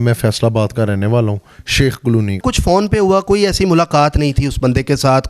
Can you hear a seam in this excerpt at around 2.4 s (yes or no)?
yes